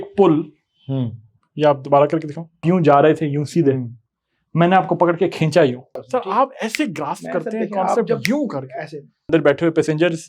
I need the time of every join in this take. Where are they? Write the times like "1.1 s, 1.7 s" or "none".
2.6 s, 6.0 s, 9.3 s